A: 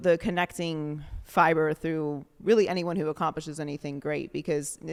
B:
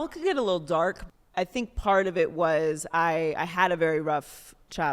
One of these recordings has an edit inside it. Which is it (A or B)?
B